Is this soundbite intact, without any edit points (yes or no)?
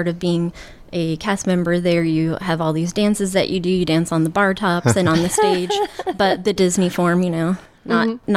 yes